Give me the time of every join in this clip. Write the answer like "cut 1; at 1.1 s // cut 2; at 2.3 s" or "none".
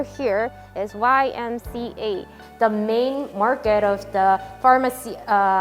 cut 1; at 2.4 s